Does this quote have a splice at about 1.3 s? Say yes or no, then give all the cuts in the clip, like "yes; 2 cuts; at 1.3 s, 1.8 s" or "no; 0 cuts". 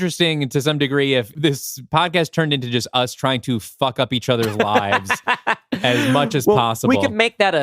yes; 1 cut; at 1.3 s